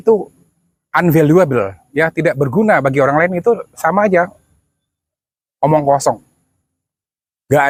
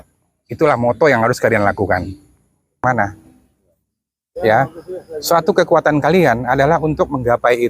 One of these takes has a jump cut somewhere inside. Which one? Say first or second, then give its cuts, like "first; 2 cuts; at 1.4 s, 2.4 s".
second; 1 cut; at 2.8 s